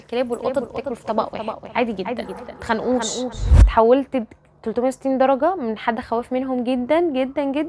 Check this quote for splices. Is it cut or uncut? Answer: cut